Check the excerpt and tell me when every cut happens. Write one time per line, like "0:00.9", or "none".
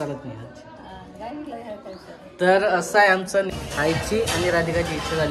0:03.5